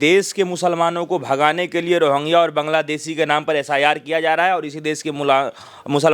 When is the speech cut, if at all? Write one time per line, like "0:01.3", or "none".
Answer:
none